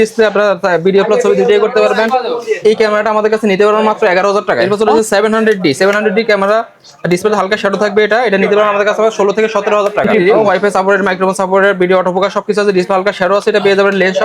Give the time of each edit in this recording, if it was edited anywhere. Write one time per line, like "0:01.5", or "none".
0:04.6
0:10.1